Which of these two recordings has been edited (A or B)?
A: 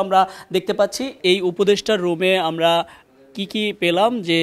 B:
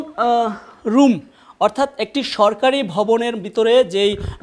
A